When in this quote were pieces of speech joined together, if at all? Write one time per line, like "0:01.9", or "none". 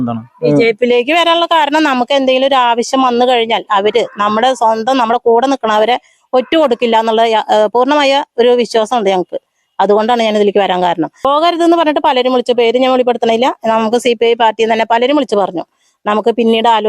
0:11.1

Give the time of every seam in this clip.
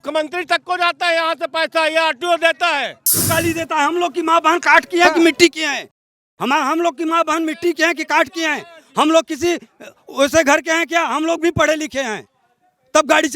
0:03.2

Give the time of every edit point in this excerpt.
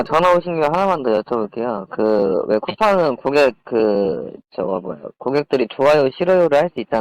none

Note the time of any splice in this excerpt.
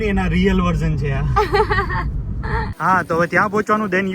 0:02.1

